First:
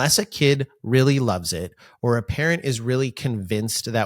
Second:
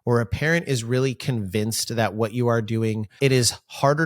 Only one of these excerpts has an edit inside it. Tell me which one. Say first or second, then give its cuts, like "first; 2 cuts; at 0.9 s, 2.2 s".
second; 1 cut; at 3.1 s